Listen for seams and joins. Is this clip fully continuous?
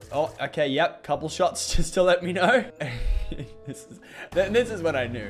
no; 1 cut; at 2.8 s

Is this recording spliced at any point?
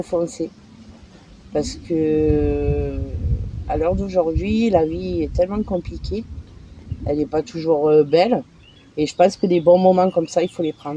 no; 0 cuts

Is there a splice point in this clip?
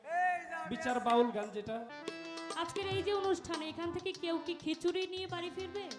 yes; 1 cut; at 1.9 s

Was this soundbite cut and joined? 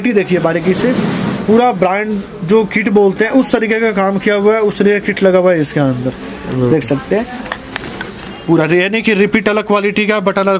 no; 0 cuts

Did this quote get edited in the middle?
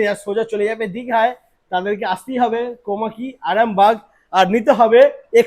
no; 0 cuts

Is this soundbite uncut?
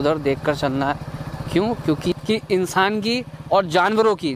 no; 1 cut; at 2.1 s

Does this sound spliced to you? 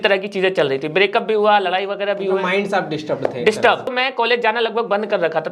yes; 1 cut; at 3.9 s

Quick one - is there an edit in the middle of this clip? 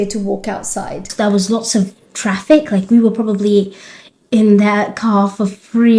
yes; 1 cut; at 1.0 s

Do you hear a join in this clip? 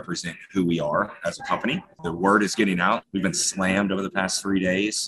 yes; 2 cuts; at 1.9 s, 3.1 s

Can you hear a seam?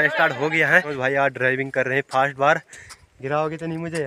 yes; 1 cut; at 0.9 s

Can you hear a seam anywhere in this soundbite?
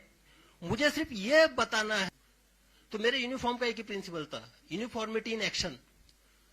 yes; 1 cut; at 2.1 s

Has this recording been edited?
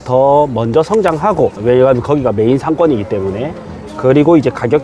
yes; 1 cut; at 1.6 s

